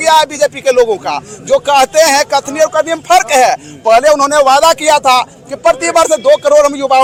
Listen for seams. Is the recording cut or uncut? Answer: uncut